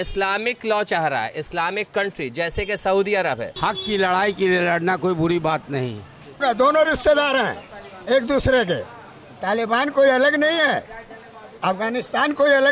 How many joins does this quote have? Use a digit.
2